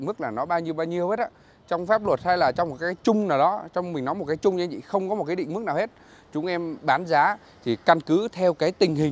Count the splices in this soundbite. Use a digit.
0